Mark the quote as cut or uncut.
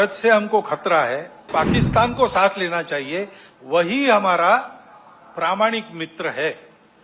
cut